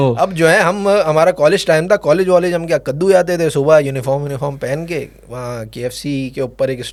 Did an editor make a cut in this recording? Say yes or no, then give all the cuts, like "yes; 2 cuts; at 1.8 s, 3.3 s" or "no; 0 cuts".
no; 0 cuts